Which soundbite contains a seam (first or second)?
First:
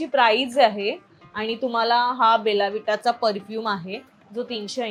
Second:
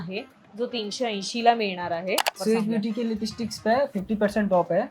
second